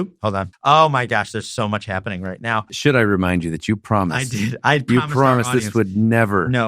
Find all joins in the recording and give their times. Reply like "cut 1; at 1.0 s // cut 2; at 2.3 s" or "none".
cut 1; at 2.7 s